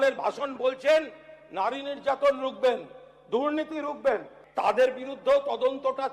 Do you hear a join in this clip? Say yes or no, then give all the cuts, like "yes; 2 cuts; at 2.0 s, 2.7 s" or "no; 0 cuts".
yes; 1 cut; at 4.4 s